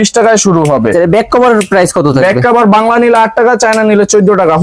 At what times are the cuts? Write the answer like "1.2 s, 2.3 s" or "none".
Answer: none